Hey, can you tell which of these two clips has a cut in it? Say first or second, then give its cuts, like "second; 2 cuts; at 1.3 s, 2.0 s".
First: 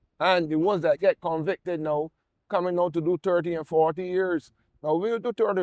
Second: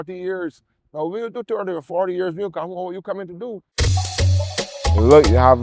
second; 1 cut; at 3.7 s